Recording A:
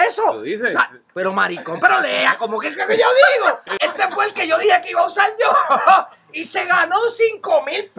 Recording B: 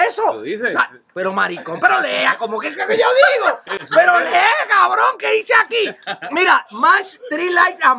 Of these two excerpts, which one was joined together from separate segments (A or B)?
A